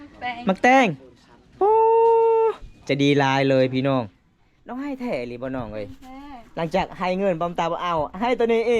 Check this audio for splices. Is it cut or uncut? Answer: uncut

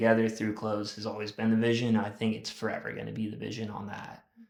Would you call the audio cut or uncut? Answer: uncut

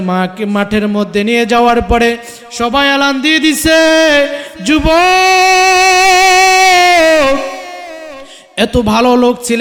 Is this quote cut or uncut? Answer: uncut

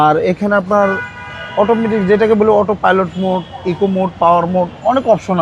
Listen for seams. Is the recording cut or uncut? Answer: uncut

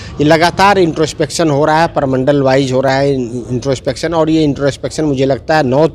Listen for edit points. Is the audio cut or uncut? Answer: uncut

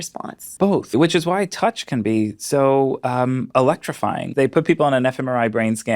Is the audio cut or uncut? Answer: cut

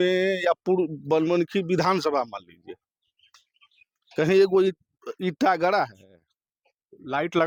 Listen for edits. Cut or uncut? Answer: uncut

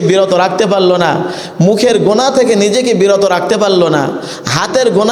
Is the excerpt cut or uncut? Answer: uncut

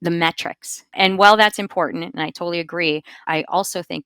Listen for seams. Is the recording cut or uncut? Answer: cut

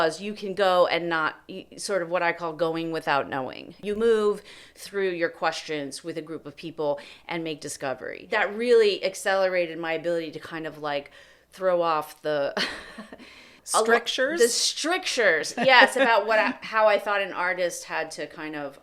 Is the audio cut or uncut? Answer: cut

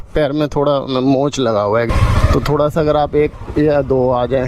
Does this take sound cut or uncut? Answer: uncut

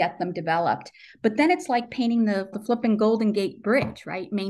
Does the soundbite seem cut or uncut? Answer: uncut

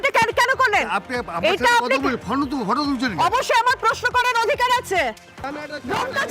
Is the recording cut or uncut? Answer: cut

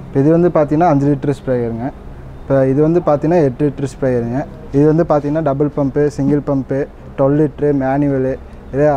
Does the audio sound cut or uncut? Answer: cut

